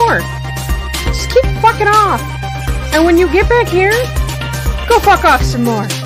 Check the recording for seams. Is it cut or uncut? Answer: uncut